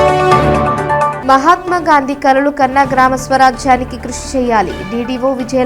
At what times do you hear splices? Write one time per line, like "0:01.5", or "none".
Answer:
0:01.1